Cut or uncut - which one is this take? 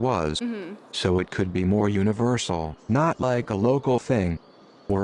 uncut